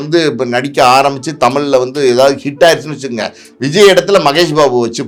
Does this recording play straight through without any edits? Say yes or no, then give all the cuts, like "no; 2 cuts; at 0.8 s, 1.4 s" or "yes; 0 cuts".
yes; 0 cuts